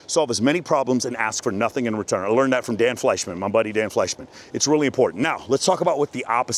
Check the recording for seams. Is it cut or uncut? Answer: uncut